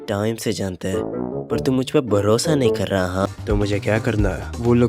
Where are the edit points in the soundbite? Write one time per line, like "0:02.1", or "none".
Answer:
0:03.3